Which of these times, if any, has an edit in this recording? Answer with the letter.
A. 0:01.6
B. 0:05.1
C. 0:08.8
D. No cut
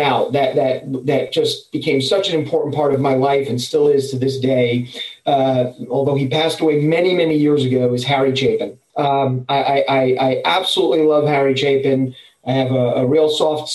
C